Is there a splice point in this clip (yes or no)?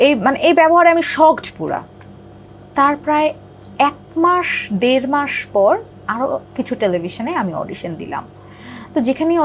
no